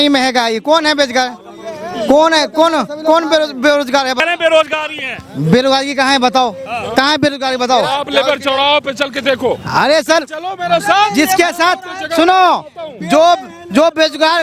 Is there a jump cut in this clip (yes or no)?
yes